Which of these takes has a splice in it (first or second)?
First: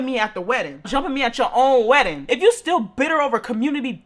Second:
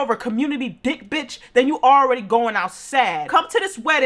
first